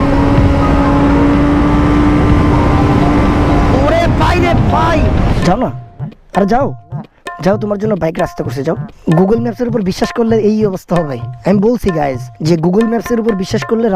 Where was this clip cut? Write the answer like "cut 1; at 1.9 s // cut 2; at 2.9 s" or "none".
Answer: cut 1; at 5.3 s